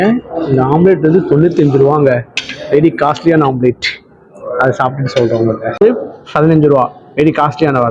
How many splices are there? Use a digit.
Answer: 1